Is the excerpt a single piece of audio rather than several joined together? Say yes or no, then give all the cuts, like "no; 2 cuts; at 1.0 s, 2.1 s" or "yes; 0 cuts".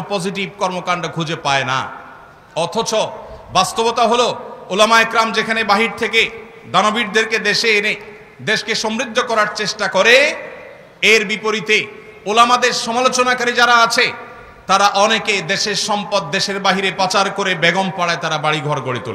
yes; 0 cuts